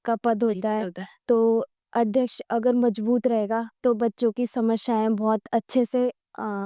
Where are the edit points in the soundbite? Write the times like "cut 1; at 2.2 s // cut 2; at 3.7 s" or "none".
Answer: none